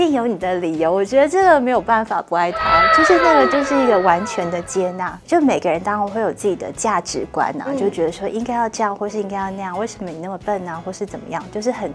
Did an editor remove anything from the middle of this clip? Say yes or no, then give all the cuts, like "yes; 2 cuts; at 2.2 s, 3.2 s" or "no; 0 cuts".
no; 0 cuts